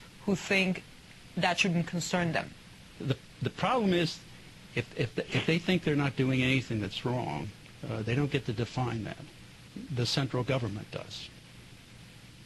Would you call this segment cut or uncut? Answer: uncut